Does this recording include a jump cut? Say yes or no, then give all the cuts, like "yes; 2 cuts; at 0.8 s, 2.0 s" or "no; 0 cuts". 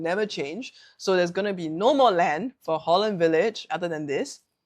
yes; 1 cut; at 3.7 s